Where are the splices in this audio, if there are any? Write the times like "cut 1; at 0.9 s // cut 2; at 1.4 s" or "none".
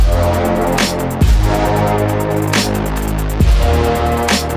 none